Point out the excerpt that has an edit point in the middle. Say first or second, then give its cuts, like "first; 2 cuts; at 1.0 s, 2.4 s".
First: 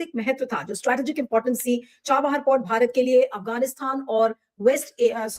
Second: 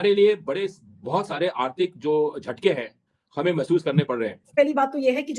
second; 1 cut; at 4.4 s